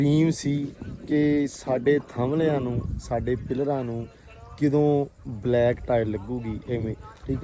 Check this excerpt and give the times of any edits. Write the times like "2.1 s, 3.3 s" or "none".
none